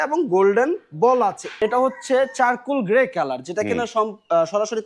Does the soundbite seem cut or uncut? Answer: cut